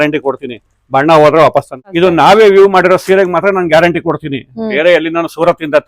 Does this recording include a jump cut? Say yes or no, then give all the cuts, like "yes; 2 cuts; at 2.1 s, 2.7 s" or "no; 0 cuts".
yes; 1 cut; at 1.8 s